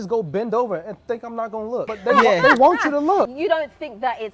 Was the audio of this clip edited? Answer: yes; 2 cuts; at 1.9 s, 3.3 s

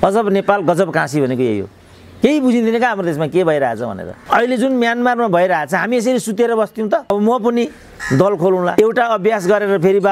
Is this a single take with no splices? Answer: no; 2 cuts; at 4.1 s, 7.1 s

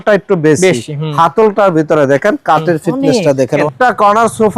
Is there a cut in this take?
yes; 1 cut; at 3.6 s

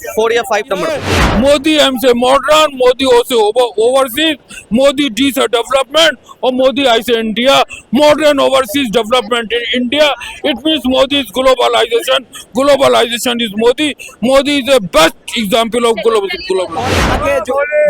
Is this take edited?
yes; 2 cuts; at 1.2 s, 17.0 s

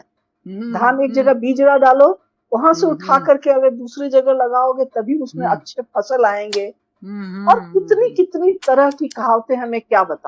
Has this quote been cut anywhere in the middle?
no; 0 cuts

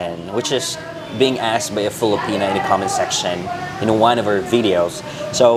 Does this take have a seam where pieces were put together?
no; 0 cuts

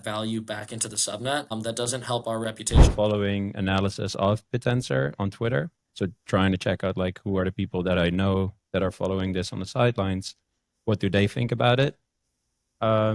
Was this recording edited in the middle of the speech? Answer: yes; 2 cuts; at 1.5 s, 2.9 s

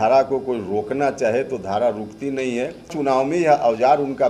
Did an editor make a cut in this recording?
yes; 1 cut; at 3.0 s

